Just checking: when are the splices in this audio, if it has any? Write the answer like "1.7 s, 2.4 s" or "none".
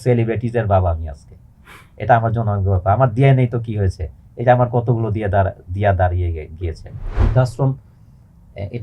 7.1 s